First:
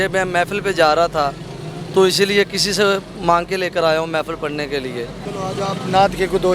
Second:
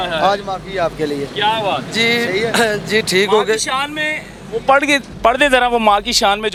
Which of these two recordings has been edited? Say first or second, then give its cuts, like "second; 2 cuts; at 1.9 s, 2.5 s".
first; 1 cut; at 5.2 s